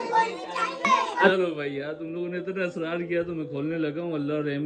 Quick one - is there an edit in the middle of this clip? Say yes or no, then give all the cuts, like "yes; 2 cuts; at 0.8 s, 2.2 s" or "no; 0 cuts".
no; 0 cuts